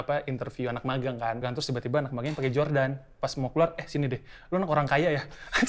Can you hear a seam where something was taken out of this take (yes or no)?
yes